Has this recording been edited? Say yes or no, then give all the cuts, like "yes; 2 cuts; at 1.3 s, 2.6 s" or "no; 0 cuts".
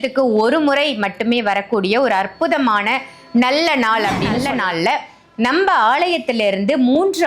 yes; 1 cut; at 4.3 s